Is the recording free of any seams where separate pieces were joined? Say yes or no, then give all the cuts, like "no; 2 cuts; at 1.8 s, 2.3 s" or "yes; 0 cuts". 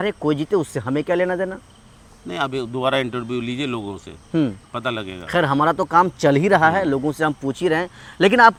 yes; 0 cuts